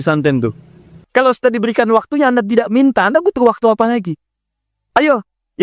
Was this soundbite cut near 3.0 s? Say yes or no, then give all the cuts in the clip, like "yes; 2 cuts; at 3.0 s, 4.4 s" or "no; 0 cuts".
no; 1 cut; at 0.9 s